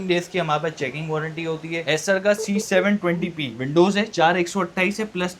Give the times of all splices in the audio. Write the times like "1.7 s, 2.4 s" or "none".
1.8 s